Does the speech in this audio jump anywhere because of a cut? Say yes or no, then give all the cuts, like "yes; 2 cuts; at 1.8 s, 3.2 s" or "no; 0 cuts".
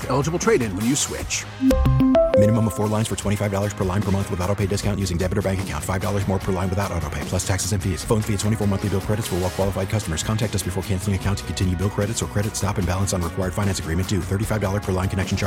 no; 0 cuts